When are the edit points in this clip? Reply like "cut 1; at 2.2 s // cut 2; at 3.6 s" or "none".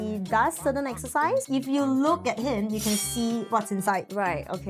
cut 1; at 1.5 s